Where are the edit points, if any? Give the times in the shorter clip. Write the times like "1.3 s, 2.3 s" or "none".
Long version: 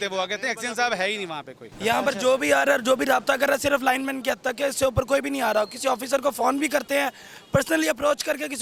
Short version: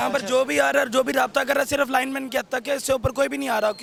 none